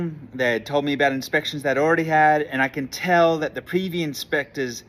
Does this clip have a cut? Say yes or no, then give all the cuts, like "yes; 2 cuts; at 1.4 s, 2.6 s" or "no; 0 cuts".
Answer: no; 0 cuts